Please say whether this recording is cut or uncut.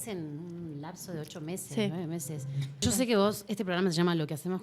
cut